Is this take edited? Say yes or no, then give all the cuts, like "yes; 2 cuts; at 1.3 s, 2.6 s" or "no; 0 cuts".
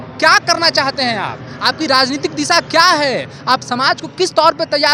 no; 0 cuts